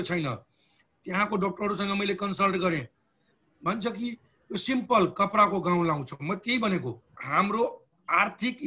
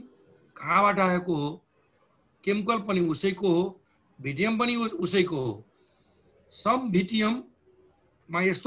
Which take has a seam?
first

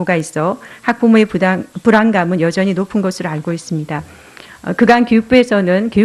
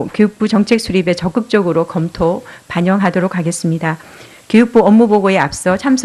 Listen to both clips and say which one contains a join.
second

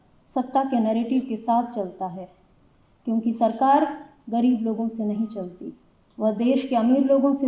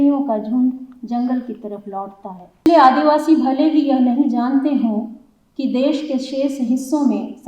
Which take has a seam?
second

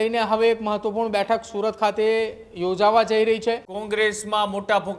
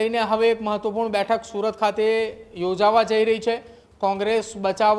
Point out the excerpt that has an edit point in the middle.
first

